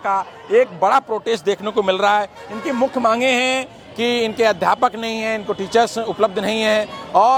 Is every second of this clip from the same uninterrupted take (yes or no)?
yes